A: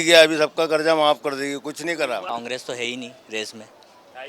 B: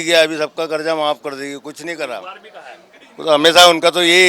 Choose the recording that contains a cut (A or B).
A